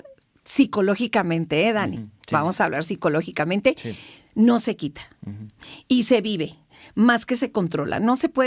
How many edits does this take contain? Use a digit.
0